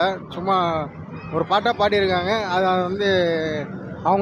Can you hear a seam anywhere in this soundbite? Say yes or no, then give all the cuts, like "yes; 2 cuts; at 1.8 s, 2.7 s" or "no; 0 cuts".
no; 0 cuts